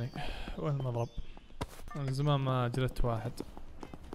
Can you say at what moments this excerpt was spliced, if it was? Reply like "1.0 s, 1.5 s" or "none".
1.8 s